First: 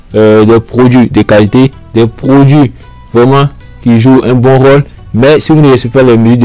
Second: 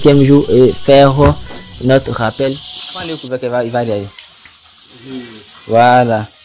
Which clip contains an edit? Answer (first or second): second